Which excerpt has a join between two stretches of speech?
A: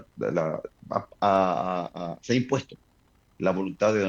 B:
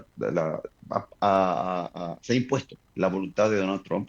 B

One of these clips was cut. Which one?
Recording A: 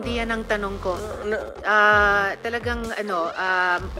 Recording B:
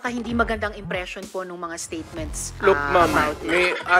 B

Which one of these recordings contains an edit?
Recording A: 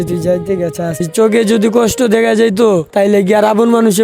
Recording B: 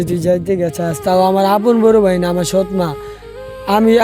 A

